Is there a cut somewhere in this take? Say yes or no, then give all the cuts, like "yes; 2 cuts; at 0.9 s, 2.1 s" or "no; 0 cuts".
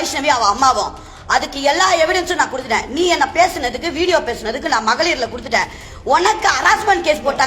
no; 0 cuts